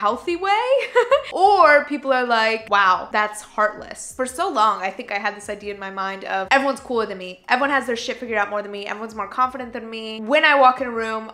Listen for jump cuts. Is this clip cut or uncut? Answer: cut